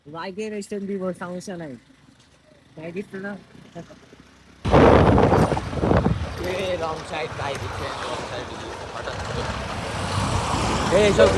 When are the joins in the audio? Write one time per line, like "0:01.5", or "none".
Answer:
0:04.6